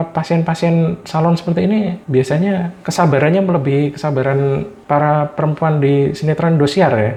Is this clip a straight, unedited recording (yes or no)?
yes